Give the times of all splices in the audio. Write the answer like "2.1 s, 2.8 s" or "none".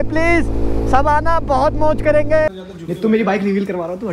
2.6 s